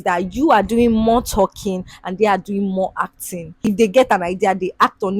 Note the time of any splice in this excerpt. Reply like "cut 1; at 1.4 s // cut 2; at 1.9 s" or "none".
cut 1; at 3.7 s